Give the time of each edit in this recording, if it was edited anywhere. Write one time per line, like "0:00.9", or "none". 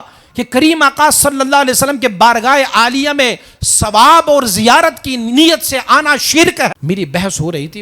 0:06.7